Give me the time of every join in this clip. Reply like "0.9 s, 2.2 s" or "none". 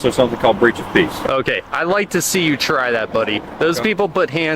none